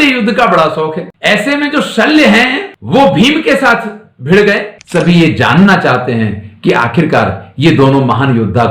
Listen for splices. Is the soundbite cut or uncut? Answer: cut